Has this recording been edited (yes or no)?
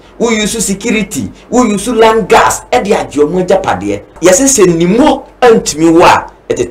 yes